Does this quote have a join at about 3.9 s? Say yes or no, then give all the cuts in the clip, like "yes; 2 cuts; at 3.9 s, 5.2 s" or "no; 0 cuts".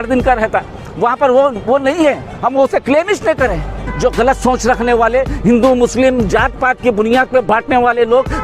yes; 1 cut; at 3.9 s